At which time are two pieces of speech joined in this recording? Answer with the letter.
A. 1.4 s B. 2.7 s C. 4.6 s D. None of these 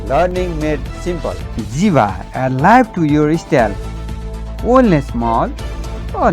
A